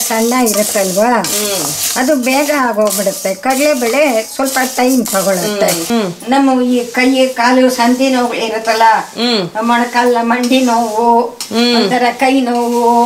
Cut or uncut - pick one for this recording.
cut